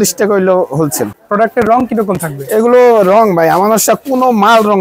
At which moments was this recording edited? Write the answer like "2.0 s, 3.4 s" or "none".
1.1 s